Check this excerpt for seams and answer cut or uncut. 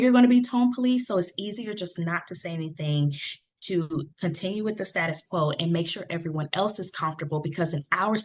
uncut